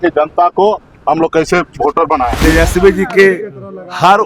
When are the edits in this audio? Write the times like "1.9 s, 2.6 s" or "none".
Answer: 2.4 s